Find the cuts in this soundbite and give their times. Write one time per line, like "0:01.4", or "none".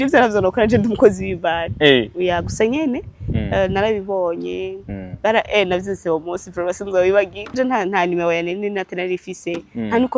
0:07.5